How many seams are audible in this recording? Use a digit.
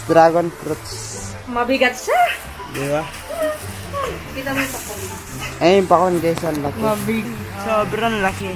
1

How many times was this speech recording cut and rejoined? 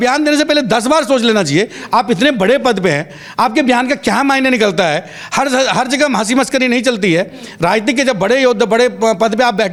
0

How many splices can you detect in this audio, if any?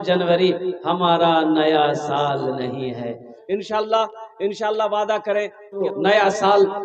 2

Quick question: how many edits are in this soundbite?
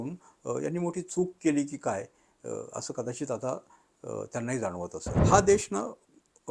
1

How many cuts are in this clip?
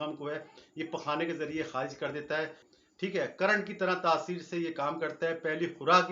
1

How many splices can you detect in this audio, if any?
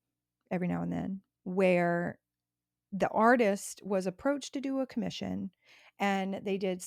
1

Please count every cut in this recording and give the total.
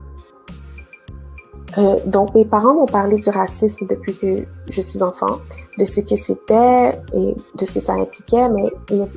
0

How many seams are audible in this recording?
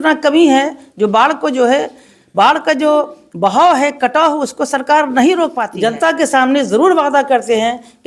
1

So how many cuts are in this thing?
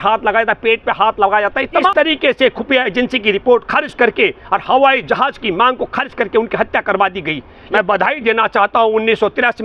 2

